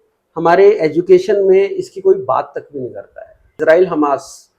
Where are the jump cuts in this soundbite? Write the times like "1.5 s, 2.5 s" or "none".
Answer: 3.5 s